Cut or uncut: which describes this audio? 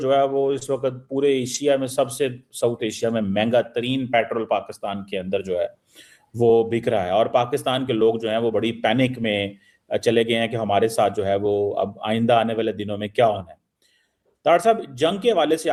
uncut